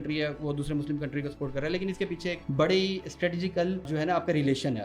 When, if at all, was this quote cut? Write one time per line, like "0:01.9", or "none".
0:02.4
0:03.9